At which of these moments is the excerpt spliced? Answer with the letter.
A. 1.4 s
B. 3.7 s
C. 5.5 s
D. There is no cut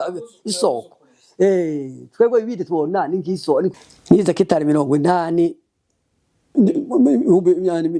B